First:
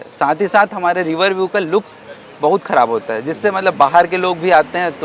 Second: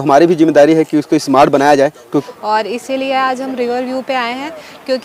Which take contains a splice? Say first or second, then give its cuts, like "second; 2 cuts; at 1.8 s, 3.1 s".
second; 1 cut; at 2.2 s